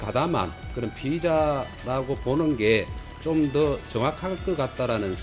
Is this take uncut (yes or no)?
yes